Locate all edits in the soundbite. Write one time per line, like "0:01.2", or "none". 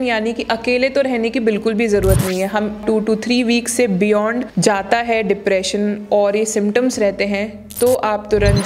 0:02.8
0:04.5